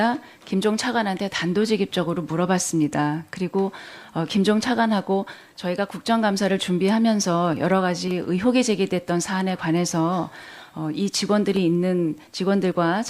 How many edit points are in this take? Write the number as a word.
one